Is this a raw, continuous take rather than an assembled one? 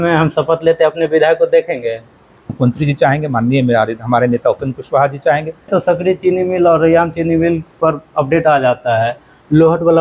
no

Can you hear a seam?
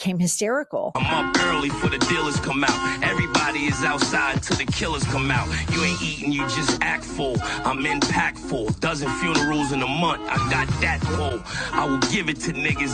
yes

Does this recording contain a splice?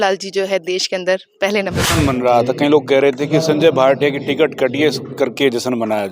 yes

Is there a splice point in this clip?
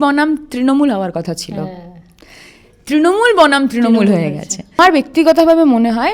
yes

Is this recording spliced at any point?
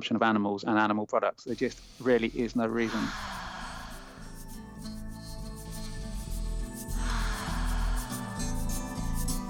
yes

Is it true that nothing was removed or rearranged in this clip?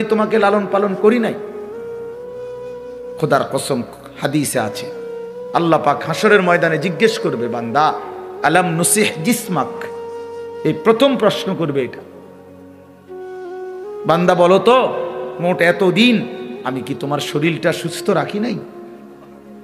yes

